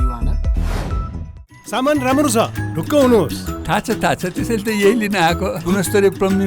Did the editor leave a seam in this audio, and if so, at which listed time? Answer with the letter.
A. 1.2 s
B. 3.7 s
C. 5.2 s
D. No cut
A